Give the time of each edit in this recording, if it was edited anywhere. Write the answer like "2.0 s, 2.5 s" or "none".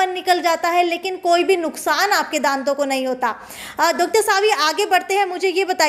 none

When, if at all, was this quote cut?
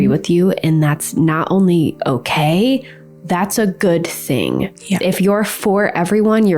none

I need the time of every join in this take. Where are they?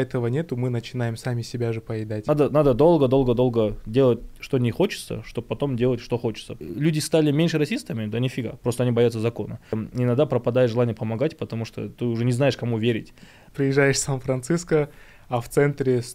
2.1 s, 6.5 s, 9.8 s, 13.4 s

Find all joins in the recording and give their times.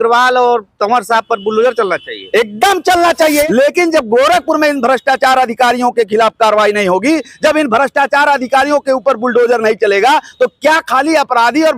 3.5 s

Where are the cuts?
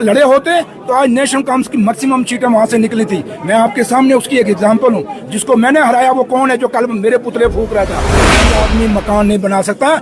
8.4 s

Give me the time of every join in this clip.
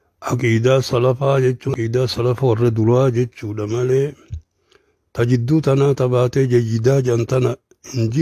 1.7 s

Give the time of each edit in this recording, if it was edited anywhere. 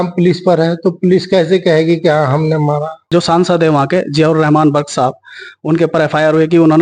3.0 s

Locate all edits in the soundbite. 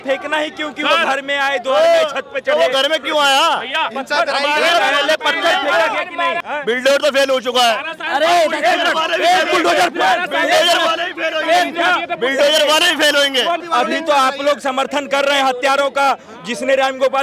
6.4 s, 13.6 s

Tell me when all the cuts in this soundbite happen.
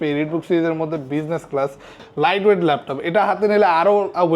2.0 s

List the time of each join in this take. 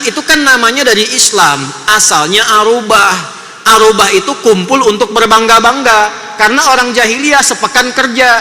none

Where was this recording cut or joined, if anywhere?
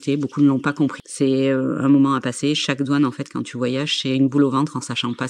1.0 s

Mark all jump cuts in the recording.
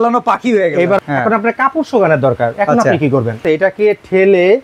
1.0 s, 3.4 s

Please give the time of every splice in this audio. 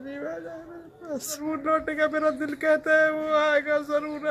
1.4 s

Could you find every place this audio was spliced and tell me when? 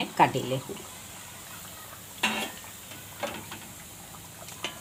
none

